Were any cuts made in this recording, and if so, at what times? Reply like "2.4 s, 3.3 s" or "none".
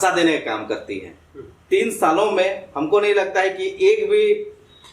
1.6 s